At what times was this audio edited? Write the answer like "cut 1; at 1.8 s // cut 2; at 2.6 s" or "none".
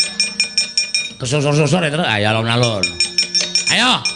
none